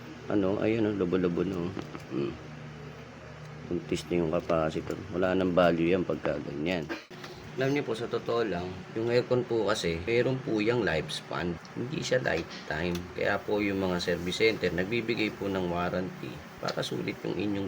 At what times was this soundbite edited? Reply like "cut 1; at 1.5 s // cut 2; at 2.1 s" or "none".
cut 1; at 7.0 s // cut 2; at 8.8 s // cut 3; at 10.0 s // cut 4; at 11.7 s